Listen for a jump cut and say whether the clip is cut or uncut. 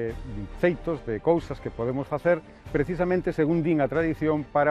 uncut